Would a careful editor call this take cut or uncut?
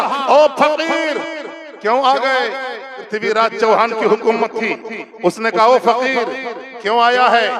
cut